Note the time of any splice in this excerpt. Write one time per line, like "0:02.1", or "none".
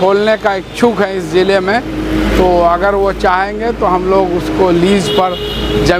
none